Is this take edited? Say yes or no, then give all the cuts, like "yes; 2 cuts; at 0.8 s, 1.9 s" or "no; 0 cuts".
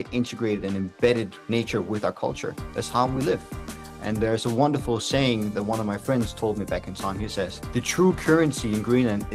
yes; 1 cut; at 1.4 s